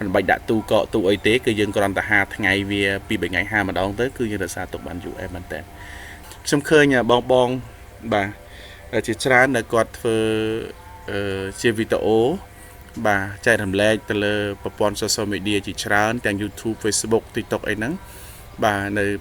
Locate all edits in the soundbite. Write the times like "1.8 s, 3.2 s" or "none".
6.1 s